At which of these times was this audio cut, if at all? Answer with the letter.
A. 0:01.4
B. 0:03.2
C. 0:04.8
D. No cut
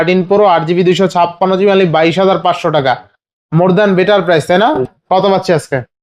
C